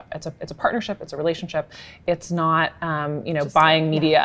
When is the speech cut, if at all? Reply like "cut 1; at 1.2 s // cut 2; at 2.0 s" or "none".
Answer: none